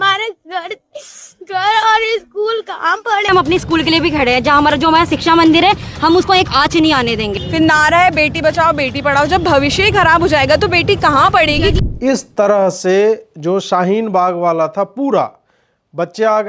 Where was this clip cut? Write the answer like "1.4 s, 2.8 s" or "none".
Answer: 3.3 s, 7.4 s, 11.8 s